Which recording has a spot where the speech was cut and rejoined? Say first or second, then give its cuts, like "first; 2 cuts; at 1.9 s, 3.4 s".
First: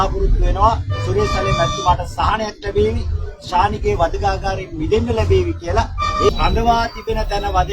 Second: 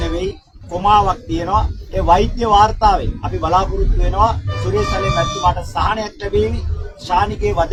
first; 1 cut; at 6.3 s